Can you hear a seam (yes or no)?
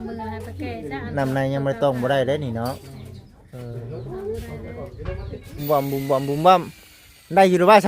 yes